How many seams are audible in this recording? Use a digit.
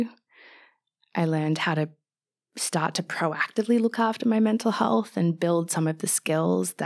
0